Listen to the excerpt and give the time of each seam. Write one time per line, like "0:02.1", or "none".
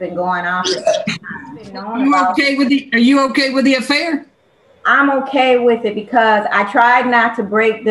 0:01.8